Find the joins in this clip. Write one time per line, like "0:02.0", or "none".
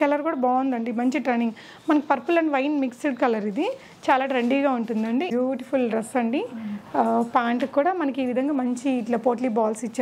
0:05.3